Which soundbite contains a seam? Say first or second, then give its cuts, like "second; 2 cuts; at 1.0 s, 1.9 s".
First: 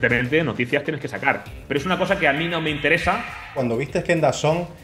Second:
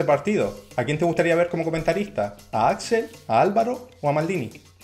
first; 1 cut; at 3.6 s